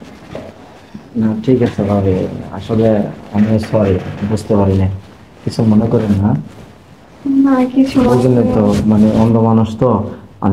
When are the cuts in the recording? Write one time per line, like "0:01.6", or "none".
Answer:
none